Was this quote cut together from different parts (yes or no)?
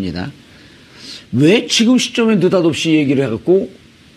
no